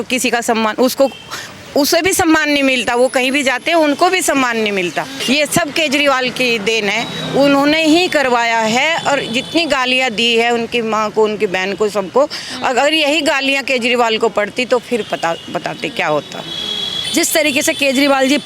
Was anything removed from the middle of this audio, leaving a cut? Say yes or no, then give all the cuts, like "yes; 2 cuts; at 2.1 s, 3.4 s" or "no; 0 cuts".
yes; 2 cuts; at 5.1 s, 16.9 s